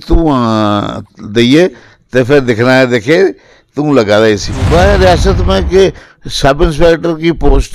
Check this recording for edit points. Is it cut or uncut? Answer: cut